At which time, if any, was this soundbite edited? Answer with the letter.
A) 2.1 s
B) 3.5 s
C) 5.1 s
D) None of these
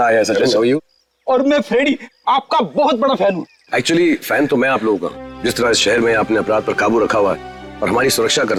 D